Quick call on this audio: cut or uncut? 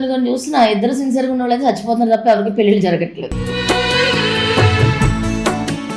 uncut